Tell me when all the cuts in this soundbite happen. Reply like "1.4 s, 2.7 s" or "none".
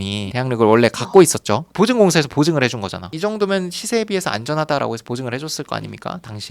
3.1 s